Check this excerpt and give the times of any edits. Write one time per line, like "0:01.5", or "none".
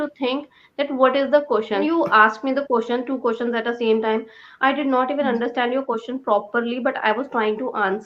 0:01.8

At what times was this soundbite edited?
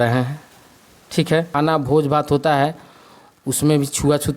0:01.5

